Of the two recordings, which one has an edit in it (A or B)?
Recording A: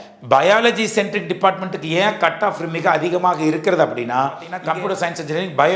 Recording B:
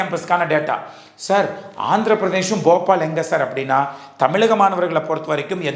A